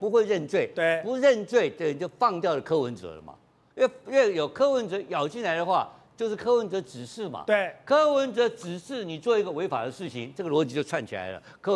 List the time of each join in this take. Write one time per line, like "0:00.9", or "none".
none